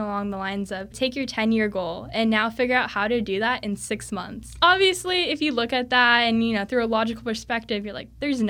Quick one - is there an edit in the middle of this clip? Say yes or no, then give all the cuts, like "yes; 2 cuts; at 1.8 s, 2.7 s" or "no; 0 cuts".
yes; 2 cuts; at 1.0 s, 4.6 s